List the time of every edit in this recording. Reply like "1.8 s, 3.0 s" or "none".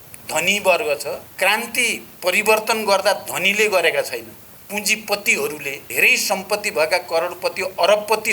1.3 s, 5.8 s

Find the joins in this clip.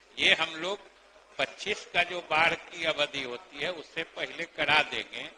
none

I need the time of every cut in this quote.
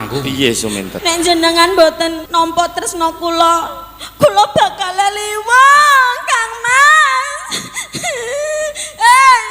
0.9 s, 2.2 s

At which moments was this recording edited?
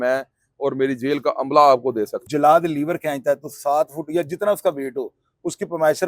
2.2 s

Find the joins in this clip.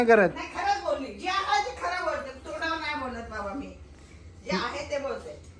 none

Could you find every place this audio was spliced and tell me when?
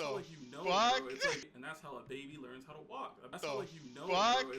1.6 s, 3.3 s

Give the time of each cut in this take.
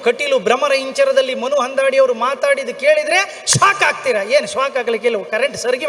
none

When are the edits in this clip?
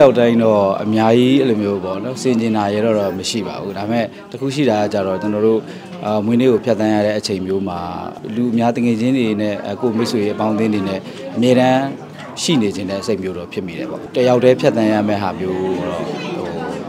8.2 s, 14.0 s

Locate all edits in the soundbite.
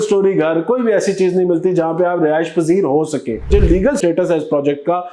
3.5 s

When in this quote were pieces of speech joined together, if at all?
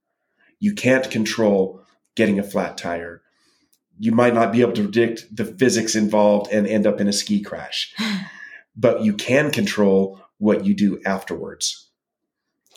none

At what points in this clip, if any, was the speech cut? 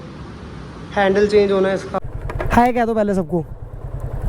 2.0 s

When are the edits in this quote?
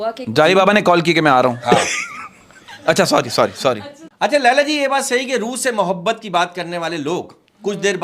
3.8 s

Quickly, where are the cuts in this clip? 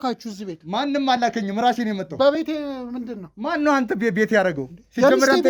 none

